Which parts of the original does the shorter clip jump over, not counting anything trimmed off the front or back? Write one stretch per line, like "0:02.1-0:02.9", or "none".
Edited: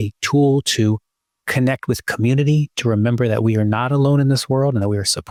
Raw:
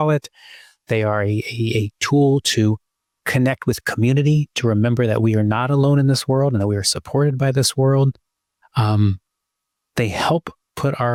none